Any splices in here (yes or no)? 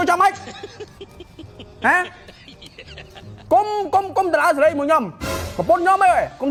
no